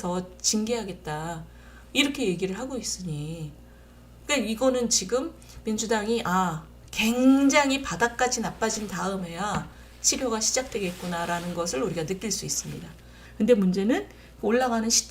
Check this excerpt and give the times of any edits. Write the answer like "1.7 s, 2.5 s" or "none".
13.2 s